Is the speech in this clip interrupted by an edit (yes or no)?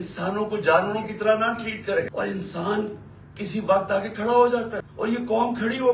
yes